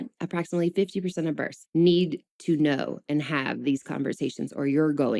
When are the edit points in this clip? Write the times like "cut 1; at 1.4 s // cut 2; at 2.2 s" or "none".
none